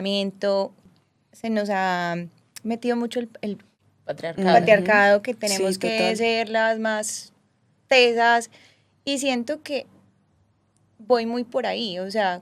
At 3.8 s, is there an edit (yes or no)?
yes